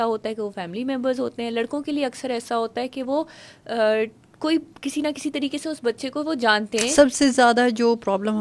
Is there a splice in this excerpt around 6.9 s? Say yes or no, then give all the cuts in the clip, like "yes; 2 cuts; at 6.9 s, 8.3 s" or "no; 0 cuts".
yes; 1 cut; at 6.9 s